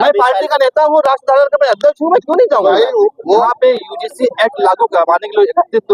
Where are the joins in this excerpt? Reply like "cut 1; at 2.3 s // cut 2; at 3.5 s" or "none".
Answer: cut 1; at 3.4 s